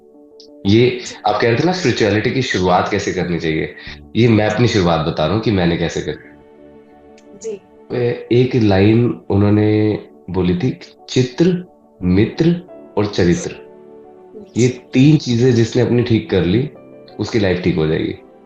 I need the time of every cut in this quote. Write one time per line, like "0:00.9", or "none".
none